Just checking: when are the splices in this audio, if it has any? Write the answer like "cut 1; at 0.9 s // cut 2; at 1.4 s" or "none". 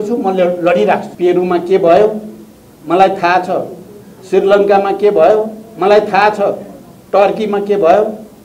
cut 1; at 1.1 s

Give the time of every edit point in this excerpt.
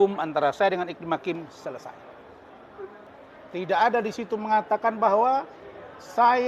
cut 1; at 3.1 s

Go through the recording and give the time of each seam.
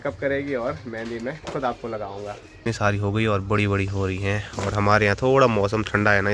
cut 1; at 2.7 s

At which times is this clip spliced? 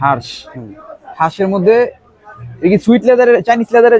none

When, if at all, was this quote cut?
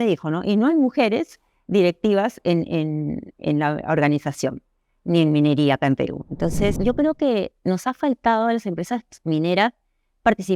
cut 1; at 6.8 s

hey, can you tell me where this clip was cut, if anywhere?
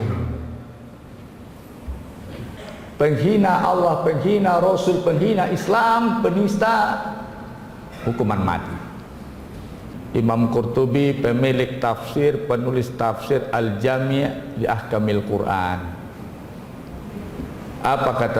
cut 1; at 2.5 s // cut 2; at 10.0 s

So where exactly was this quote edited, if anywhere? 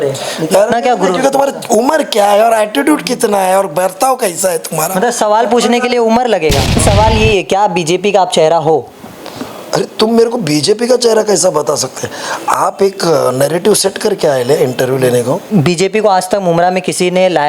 cut 1; at 6.8 s // cut 2; at 15.5 s

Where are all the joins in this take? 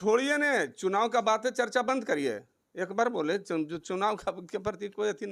none

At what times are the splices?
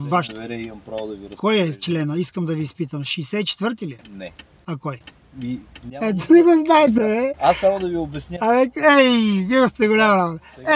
none

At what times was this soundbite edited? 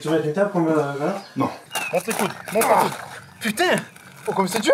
cut 1; at 1.6 s

